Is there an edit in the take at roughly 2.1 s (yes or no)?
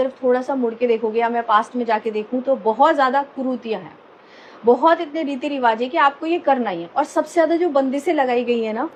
no